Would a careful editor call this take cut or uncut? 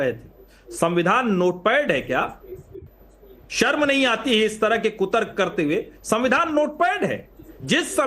uncut